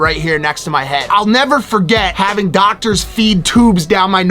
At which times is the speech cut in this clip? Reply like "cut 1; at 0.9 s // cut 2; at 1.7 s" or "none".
cut 1; at 1.0 s // cut 2; at 2.1 s